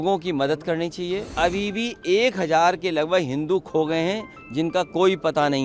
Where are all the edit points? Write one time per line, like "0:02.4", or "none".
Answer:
0:01.3